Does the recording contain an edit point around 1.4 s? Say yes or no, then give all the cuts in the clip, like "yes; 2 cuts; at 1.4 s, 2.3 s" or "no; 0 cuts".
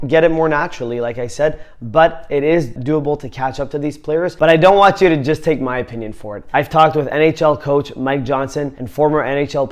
no; 2 cuts; at 2.8 s, 4.3 s